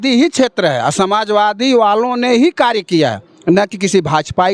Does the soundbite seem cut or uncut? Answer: uncut